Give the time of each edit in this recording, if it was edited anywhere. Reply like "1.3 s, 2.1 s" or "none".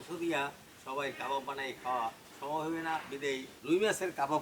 3.5 s